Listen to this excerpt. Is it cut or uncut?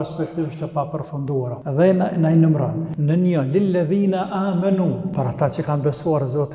cut